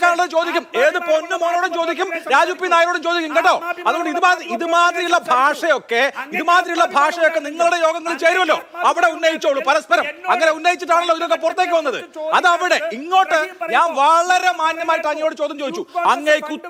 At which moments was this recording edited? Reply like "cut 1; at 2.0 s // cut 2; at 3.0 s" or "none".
none